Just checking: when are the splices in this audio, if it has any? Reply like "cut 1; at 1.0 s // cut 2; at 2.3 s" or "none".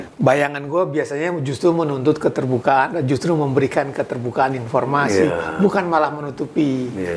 none